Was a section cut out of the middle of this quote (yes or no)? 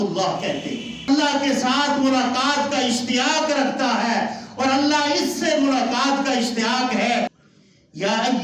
yes